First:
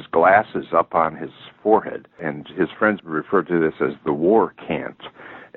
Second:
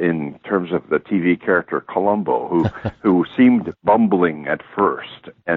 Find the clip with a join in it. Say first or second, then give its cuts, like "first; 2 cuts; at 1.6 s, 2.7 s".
first; 1 cut; at 3.0 s